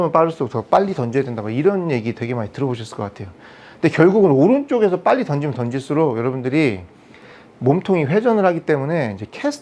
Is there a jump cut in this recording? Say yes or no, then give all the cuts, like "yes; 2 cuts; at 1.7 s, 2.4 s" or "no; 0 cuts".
no; 0 cuts